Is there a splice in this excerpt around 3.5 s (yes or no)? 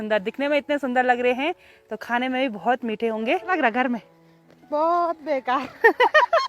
yes